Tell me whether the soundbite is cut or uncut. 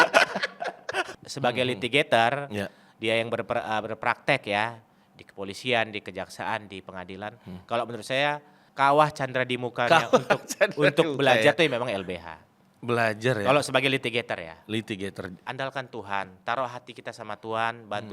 cut